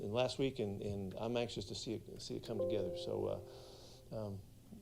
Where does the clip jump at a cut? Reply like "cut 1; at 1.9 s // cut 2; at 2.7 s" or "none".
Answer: cut 1; at 3.5 s